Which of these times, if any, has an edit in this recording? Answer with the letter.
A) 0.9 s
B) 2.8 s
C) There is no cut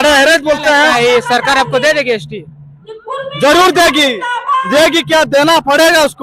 A